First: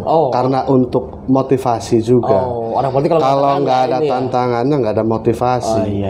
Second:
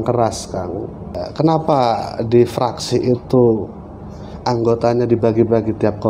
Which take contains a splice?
second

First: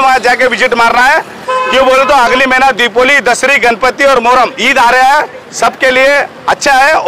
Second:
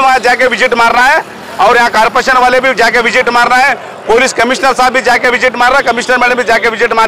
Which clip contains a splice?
first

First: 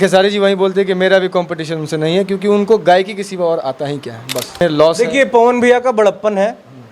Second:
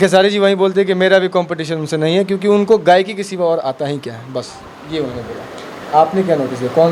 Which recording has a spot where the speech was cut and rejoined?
first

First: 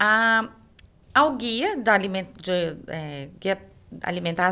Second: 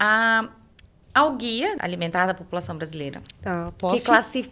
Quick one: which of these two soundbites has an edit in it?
second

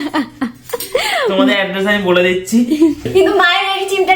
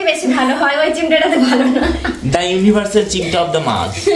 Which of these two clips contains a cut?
first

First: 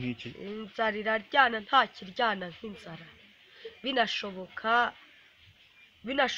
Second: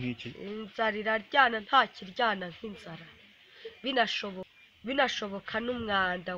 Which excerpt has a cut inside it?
second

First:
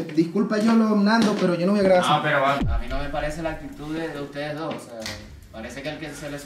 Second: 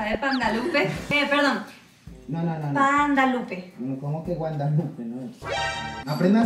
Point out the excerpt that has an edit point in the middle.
first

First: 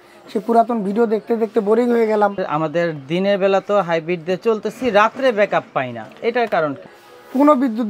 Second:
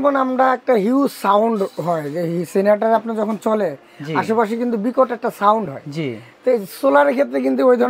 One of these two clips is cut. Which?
first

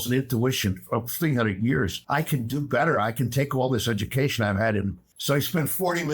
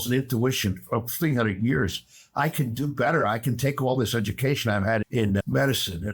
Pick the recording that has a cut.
first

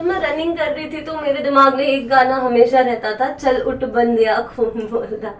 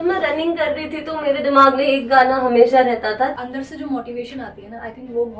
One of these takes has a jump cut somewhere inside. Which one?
second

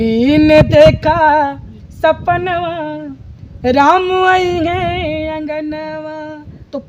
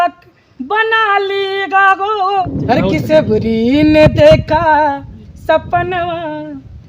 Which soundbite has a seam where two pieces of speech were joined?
second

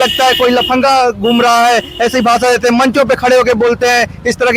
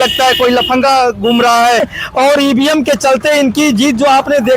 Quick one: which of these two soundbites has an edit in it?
second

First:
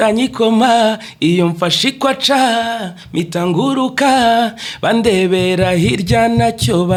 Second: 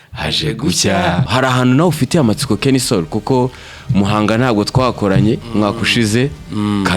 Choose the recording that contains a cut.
second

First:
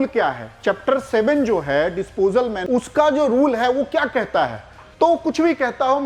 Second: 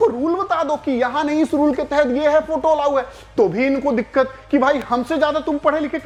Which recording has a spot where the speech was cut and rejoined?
first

